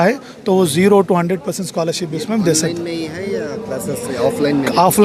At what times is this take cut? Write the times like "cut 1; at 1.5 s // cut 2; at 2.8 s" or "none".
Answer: none

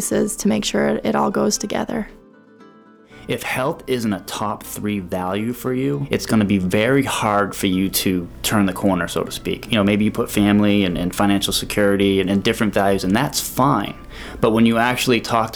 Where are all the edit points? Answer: cut 1; at 2.7 s // cut 2; at 6.0 s // cut 3; at 8.4 s // cut 4; at 9.7 s

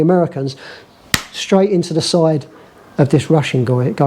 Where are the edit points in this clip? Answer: none

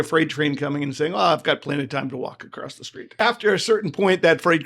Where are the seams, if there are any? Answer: cut 1; at 3.2 s

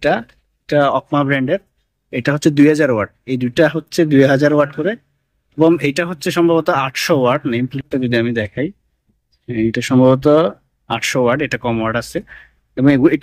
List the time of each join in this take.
none

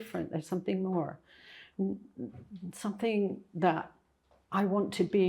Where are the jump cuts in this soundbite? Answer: none

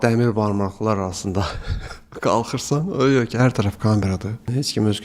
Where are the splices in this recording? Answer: none

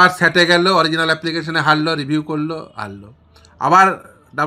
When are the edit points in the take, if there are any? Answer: none

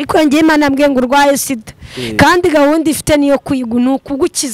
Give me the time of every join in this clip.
none

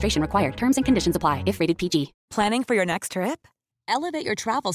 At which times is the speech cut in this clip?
cut 1; at 2.2 s

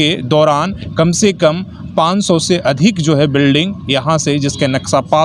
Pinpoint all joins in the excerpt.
none

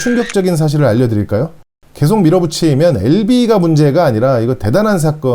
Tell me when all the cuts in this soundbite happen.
cut 1; at 1.7 s

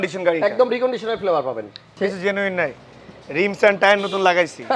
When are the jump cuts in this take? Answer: cut 1; at 2.0 s

